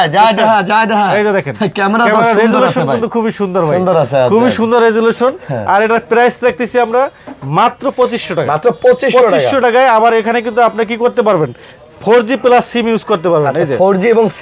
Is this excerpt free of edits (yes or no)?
yes